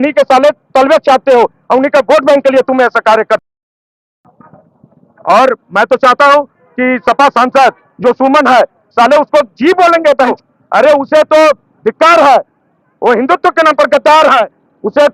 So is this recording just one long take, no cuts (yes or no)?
yes